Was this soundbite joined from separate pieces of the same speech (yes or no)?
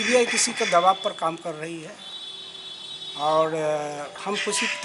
no